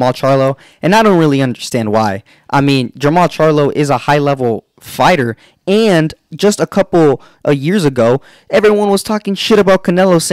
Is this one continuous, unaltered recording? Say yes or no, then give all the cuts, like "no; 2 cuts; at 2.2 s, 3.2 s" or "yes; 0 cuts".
yes; 0 cuts